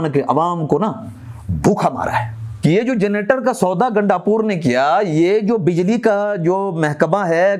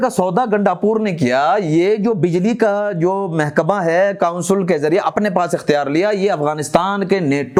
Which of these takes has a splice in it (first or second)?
first